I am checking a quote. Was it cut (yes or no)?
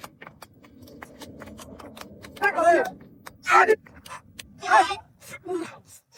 no